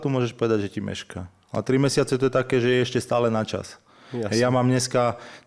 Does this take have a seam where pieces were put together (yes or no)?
no